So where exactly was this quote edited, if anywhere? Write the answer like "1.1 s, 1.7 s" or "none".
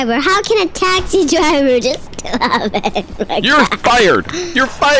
none